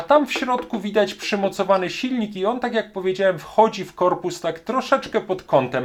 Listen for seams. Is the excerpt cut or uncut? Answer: uncut